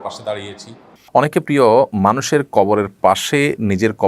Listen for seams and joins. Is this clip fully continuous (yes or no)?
no